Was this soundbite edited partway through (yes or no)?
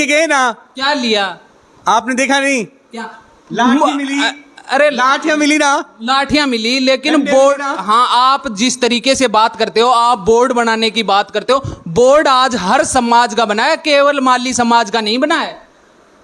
no